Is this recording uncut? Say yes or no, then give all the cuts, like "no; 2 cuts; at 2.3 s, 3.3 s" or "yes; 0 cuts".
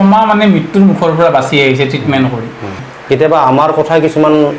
no; 1 cut; at 2.9 s